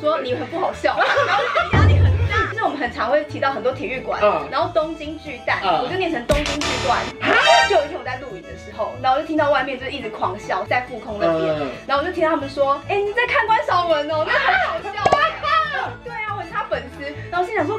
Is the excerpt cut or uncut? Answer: cut